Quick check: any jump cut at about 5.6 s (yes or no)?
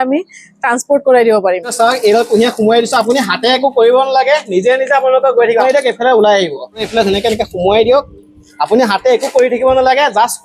yes